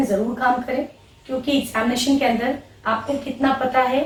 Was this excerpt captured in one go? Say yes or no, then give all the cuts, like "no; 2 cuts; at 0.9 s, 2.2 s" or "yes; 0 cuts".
yes; 0 cuts